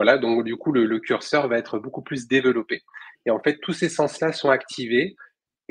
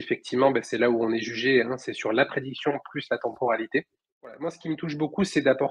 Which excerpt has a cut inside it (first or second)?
second